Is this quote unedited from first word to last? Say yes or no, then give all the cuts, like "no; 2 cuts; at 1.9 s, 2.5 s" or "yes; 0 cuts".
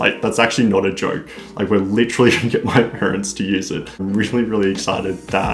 no; 1 cut; at 4.0 s